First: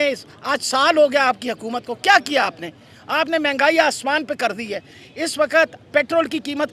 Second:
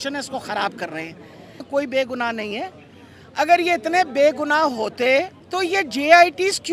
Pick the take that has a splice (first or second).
second